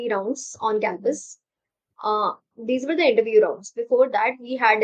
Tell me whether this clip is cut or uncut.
uncut